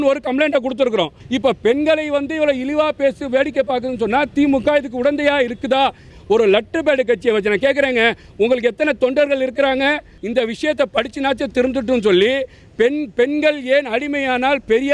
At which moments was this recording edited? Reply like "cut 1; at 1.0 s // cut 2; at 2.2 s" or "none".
cut 1; at 1.2 s // cut 2; at 6.1 s // cut 3; at 10.1 s